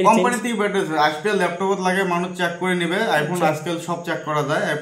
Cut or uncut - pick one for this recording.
uncut